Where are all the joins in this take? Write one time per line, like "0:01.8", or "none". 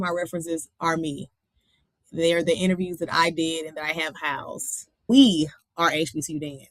0:05.1